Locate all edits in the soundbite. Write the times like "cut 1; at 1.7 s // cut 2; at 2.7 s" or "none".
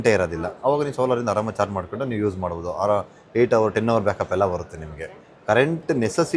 none